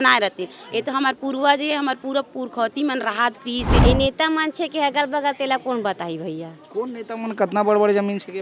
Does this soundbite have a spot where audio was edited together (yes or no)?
yes